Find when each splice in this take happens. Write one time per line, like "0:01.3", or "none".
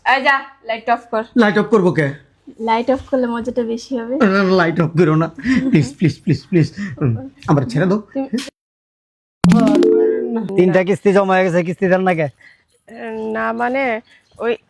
0:10.5